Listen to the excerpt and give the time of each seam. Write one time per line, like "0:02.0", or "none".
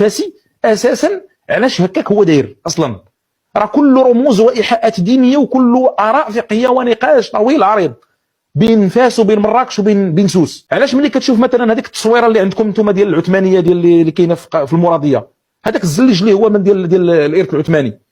0:10.6